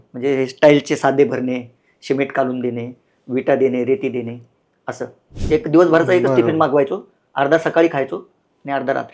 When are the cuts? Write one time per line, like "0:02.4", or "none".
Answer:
0:05.3